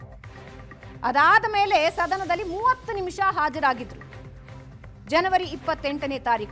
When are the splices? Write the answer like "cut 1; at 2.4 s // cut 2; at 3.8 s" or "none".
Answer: cut 1; at 1.0 s

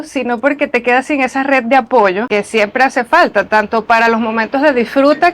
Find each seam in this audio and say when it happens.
cut 1; at 2.2 s

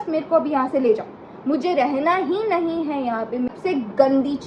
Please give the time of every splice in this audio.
cut 1; at 3.5 s

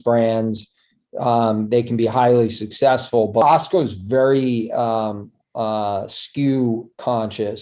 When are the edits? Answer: cut 1; at 3.4 s

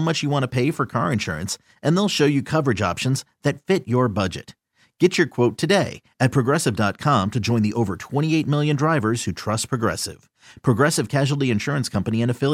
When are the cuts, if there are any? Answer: none

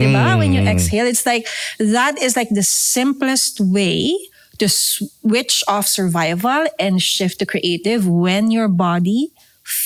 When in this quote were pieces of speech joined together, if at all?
none

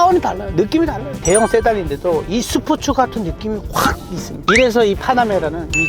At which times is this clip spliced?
cut 1; at 1.2 s // cut 2; at 4.3 s

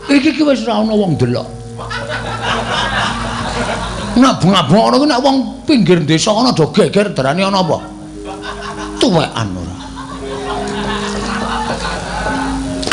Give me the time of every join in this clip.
none

